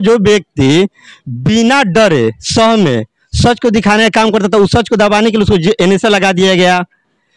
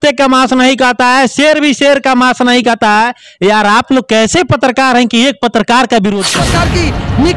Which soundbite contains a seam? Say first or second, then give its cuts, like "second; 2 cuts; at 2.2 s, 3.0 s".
second; 1 cut; at 6.5 s